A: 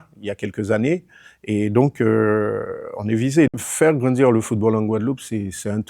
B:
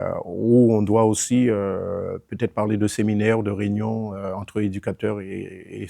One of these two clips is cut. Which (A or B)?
A